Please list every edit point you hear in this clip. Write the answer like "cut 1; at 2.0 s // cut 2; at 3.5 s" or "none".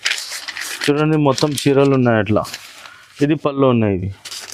none